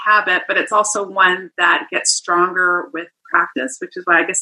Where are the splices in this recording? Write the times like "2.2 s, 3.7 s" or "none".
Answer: none